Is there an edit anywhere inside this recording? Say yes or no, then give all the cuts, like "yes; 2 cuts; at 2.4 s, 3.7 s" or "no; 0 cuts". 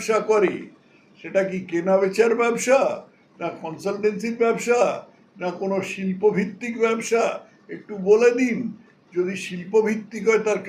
no; 0 cuts